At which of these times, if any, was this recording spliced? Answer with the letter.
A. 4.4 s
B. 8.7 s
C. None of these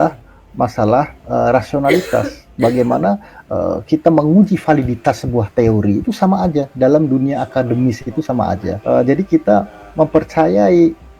B